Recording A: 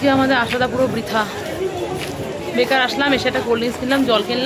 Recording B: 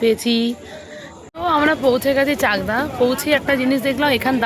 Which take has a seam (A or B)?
B